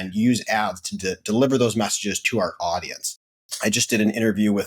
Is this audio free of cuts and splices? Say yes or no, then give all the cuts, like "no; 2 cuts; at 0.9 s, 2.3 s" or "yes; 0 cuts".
no; 2 cuts; at 2.2 s, 3.5 s